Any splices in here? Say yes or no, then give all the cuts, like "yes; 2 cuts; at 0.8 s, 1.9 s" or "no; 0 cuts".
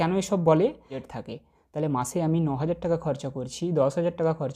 yes; 1 cut; at 1.1 s